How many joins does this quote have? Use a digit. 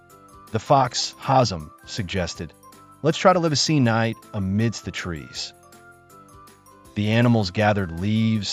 2